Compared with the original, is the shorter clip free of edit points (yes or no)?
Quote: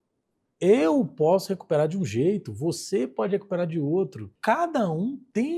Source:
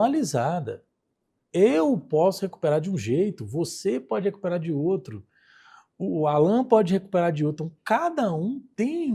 no